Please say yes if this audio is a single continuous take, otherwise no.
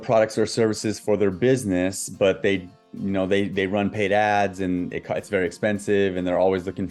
yes